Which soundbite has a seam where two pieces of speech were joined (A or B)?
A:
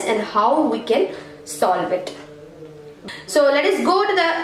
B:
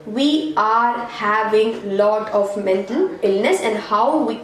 A